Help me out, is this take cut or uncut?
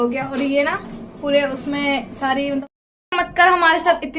cut